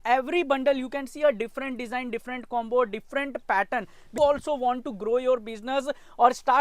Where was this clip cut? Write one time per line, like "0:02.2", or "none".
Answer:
0:04.2